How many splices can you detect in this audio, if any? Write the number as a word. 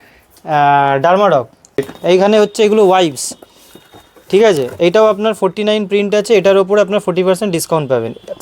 one